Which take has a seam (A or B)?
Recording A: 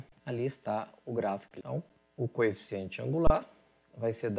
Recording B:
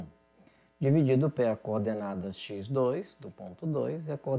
A